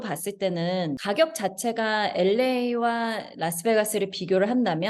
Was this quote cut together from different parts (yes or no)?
yes